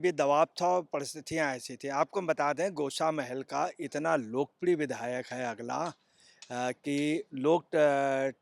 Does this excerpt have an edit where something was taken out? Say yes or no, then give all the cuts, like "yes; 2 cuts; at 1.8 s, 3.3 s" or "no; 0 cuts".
no; 0 cuts